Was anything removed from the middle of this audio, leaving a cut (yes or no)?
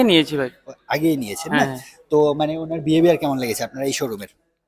no